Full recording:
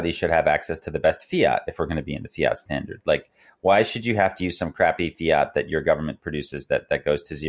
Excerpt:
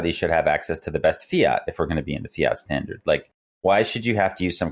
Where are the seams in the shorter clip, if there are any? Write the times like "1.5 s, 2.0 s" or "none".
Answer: none